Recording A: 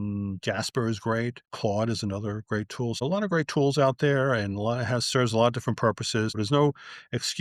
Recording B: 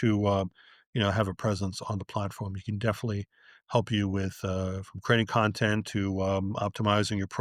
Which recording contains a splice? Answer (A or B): A